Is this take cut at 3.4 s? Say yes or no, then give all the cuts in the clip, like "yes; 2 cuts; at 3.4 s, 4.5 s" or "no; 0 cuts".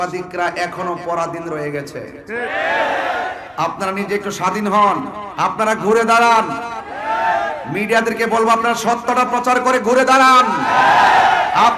yes; 2 cuts; at 3.4 s, 5.2 s